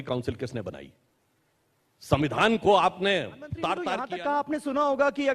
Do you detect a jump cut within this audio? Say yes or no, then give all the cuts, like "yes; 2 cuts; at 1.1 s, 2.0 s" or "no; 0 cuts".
yes; 1 cut; at 4.0 s